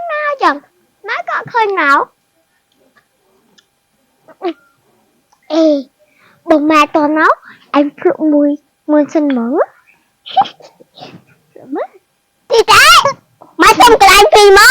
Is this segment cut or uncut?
cut